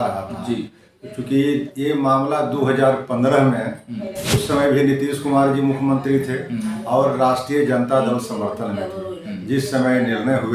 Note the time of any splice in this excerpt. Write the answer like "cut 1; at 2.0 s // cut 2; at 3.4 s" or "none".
none

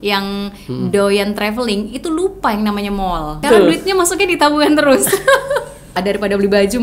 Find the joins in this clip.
cut 1; at 3.4 s // cut 2; at 5.9 s

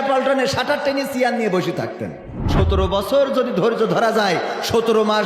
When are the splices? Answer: cut 1; at 2.4 s

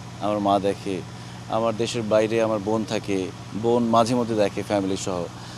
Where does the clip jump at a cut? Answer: none

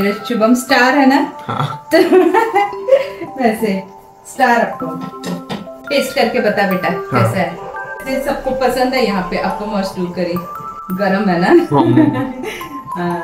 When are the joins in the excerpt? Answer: none

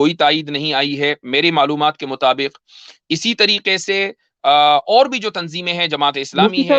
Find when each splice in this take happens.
none

